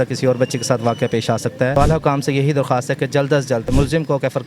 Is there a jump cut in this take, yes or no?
yes